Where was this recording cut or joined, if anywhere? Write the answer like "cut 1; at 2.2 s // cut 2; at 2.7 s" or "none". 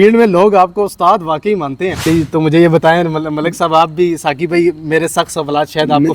cut 1; at 2.1 s